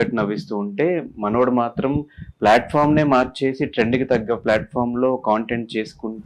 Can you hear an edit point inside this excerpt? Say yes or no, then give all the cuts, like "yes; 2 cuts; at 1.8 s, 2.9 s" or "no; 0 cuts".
no; 0 cuts